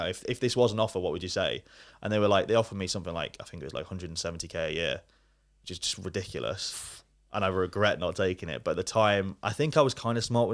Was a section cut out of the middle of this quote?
no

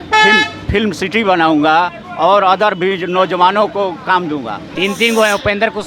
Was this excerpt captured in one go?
no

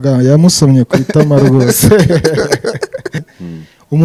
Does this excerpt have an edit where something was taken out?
yes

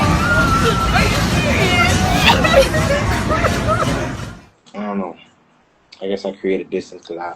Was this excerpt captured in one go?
no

